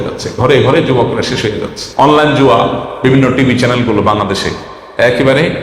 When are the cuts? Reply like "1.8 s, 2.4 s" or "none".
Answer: 1.8 s